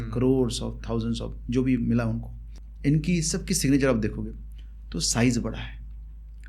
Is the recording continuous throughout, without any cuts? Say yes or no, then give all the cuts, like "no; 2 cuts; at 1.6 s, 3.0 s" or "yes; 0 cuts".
yes; 0 cuts